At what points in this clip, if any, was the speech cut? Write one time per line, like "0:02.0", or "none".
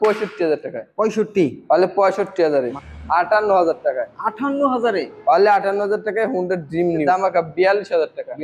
0:02.6
0:07.0